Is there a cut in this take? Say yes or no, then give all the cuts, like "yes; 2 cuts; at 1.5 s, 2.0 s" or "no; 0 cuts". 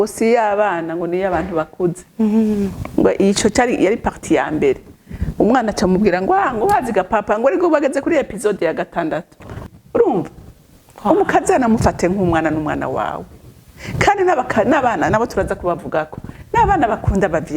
yes; 1 cut; at 9.7 s